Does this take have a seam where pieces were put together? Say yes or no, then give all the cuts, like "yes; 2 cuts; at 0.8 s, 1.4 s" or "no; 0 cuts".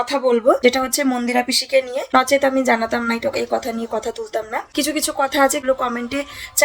yes; 3 cuts; at 2.1 s, 4.6 s, 5.6 s